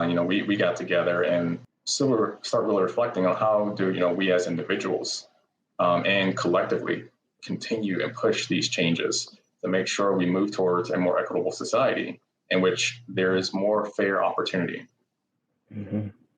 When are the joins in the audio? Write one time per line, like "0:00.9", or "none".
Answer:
0:01.6